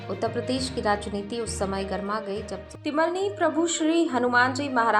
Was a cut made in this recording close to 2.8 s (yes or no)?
yes